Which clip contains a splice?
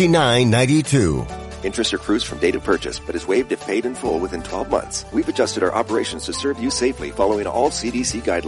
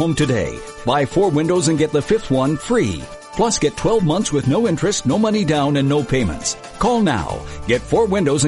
first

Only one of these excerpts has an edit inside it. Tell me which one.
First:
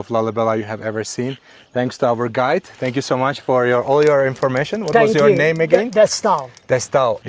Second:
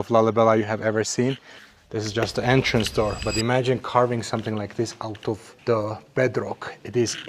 second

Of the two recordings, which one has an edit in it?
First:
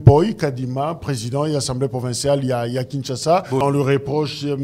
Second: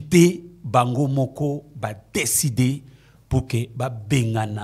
first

